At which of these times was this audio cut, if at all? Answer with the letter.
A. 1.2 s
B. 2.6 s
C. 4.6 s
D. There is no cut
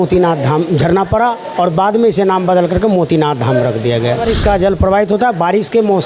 C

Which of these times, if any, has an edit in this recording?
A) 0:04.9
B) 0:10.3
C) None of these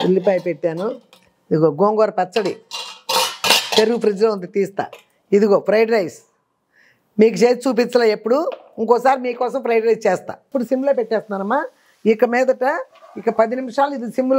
B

